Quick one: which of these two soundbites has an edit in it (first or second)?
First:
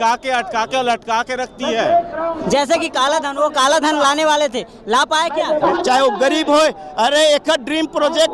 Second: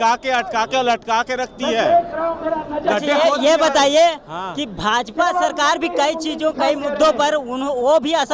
first